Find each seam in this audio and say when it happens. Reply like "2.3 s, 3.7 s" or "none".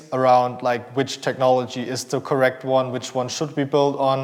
none